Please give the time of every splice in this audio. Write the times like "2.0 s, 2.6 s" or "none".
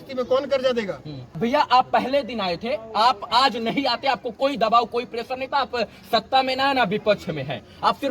1.4 s